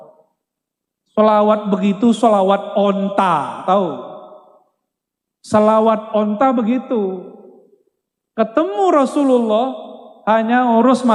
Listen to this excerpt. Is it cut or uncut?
uncut